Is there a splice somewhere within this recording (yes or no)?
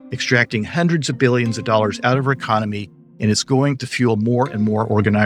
no